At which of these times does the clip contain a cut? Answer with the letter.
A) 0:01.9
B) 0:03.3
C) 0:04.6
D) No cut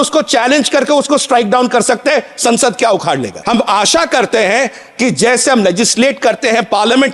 B